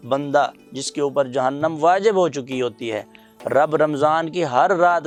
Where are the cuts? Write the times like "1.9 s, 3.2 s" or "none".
none